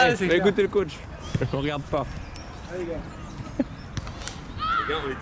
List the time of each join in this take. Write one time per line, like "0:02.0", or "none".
none

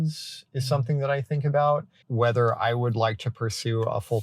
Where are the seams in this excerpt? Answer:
0:02.0

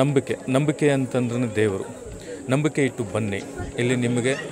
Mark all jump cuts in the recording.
none

